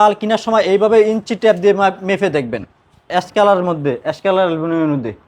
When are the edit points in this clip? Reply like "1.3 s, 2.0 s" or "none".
3.1 s